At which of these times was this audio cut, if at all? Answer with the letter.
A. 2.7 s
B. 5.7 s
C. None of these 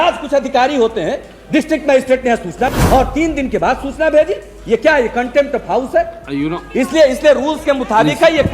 A